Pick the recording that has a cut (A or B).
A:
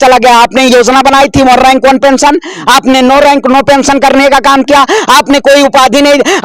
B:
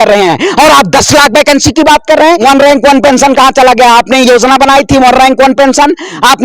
B